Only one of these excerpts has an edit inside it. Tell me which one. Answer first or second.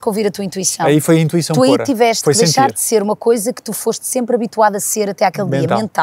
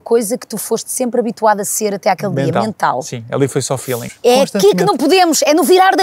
second